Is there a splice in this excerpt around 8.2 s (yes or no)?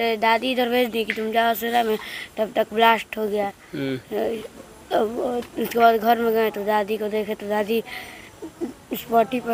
no